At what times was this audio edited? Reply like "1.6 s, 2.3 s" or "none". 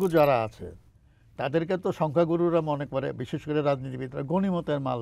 none